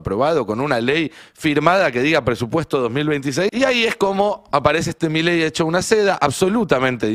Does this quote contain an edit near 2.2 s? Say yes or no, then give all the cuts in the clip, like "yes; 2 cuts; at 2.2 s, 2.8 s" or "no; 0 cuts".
no; 1 cut; at 3.5 s